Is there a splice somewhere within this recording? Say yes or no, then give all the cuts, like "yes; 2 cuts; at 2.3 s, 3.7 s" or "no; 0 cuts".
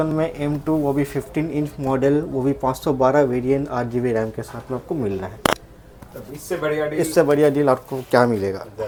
no; 0 cuts